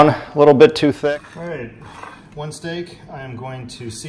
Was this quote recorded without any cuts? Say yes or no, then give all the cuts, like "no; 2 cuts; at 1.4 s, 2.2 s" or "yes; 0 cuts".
no; 1 cut; at 1.0 s